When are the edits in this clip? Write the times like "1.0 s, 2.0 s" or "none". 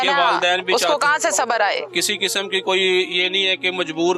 1.9 s